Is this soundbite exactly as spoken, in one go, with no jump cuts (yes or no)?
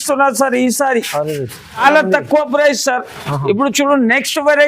no